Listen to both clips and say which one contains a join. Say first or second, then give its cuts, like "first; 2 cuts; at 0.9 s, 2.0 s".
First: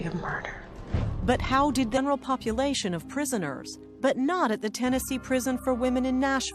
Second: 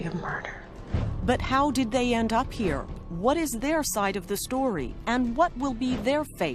second; 1 cut; at 2.0 s